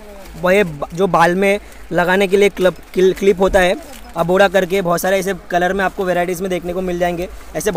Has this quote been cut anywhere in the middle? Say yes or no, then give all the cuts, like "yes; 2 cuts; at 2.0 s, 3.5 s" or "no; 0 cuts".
no; 0 cuts